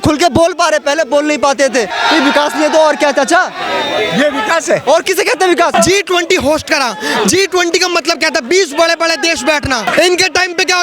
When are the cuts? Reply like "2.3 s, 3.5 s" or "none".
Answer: 1.9 s, 5.7 s, 9.9 s